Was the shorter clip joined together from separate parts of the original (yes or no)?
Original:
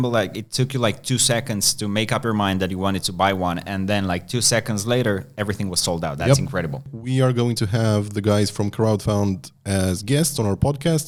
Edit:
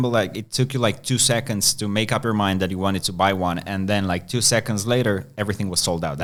no